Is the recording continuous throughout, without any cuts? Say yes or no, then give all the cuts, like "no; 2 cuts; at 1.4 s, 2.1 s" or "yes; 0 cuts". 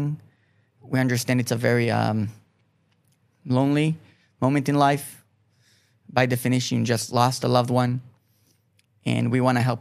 yes; 0 cuts